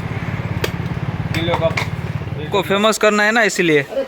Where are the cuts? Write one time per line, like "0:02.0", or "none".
0:02.3